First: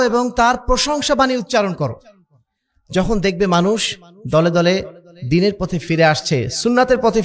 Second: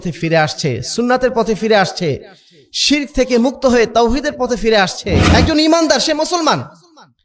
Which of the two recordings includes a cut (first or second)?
second